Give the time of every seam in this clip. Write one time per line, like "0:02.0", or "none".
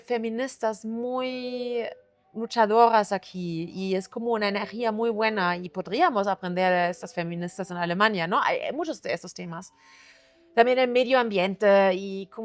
none